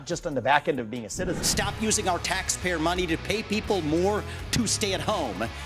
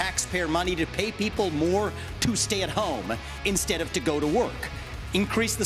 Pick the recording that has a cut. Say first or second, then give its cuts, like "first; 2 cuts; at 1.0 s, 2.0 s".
first; 1 cut; at 1.4 s